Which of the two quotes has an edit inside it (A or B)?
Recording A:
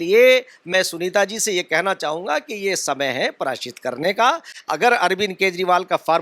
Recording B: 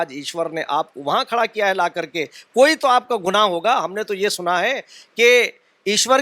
A